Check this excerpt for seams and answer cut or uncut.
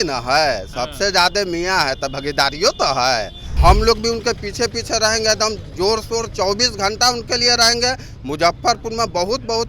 cut